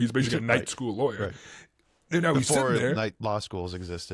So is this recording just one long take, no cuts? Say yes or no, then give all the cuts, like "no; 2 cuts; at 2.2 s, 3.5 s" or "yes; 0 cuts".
yes; 0 cuts